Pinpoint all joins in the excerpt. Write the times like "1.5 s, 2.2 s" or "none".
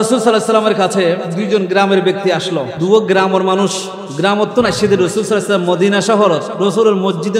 1.3 s, 2.7 s